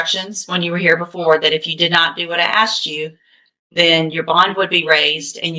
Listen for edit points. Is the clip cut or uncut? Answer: uncut